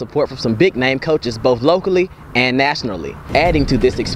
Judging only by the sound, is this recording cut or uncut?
cut